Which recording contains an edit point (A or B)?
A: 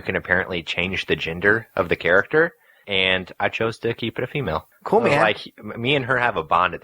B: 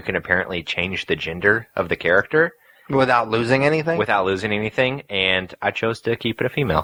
A